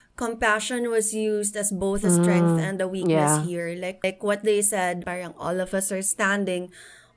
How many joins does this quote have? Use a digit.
2